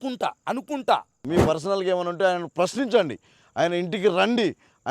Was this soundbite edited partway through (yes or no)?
yes